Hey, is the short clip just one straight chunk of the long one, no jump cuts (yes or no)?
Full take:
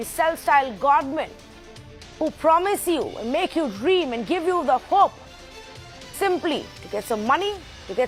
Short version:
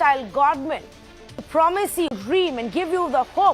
no